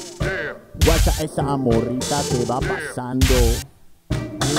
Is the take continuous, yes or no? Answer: yes